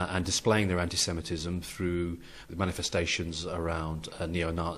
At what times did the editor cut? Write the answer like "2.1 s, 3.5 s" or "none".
2.5 s